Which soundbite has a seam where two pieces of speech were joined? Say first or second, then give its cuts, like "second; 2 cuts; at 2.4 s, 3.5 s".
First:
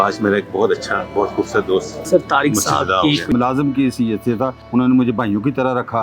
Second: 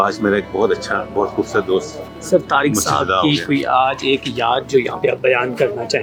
first; 3 cuts; at 2.0 s, 3.3 s, 4.6 s